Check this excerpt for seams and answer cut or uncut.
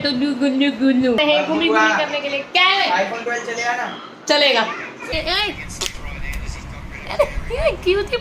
cut